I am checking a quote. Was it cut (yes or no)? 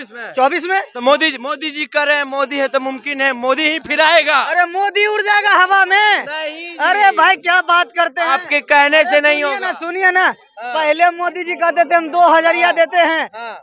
no